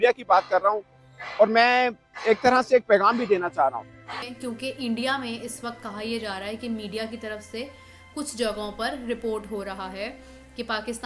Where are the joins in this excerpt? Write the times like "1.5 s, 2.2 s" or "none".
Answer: 4.3 s